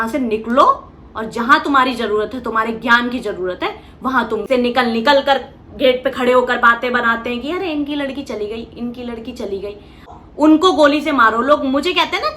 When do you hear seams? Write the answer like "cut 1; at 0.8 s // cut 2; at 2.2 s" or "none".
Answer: cut 1; at 4.5 s // cut 2; at 10.1 s